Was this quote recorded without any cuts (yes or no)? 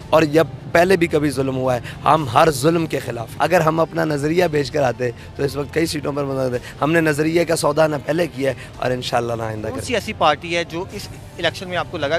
no